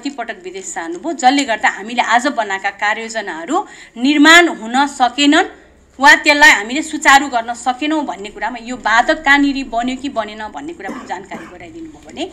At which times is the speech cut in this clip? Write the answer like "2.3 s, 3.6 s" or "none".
none